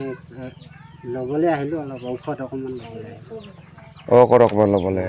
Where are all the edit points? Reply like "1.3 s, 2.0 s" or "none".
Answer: none